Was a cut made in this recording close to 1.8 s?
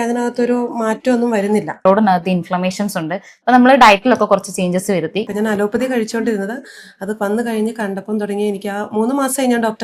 yes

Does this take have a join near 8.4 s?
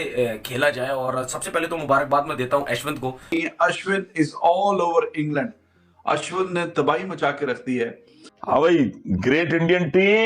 yes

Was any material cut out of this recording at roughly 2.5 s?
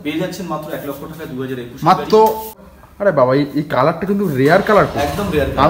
yes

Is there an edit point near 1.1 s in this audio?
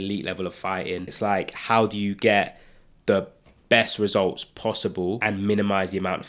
yes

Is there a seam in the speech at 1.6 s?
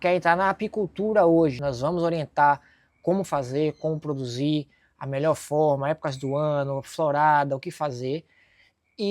yes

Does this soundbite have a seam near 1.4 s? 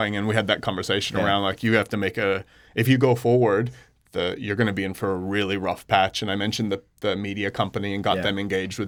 no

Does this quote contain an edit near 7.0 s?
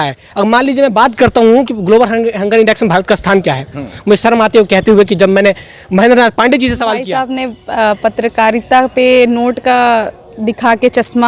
yes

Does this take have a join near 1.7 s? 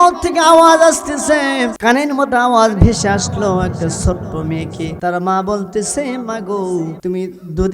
yes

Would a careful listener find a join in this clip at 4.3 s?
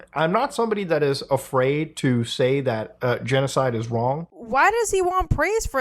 yes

